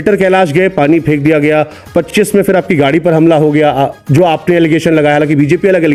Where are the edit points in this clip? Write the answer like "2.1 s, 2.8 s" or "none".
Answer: none